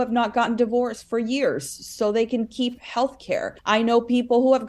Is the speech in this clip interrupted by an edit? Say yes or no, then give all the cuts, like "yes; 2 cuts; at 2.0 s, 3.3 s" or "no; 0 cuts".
yes; 1 cut; at 3.5 s